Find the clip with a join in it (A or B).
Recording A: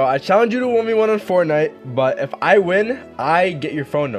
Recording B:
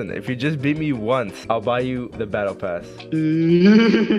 B